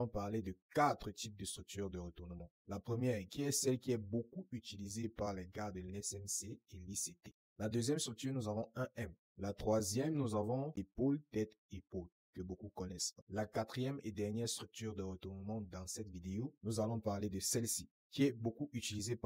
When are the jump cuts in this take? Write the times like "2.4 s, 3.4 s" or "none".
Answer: 7.2 s, 9.2 s

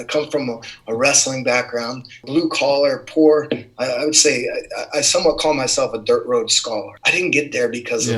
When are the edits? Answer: 2.2 s, 7.0 s

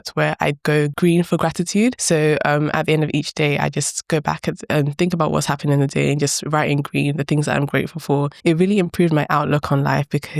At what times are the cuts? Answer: 0.9 s, 2.0 s, 8.3 s

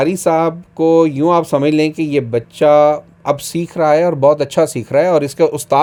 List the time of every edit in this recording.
none

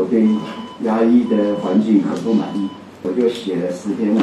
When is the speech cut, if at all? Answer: 3.1 s

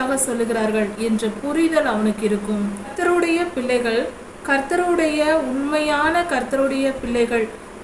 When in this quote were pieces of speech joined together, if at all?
2.9 s

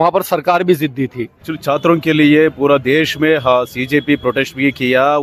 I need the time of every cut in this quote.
1.5 s

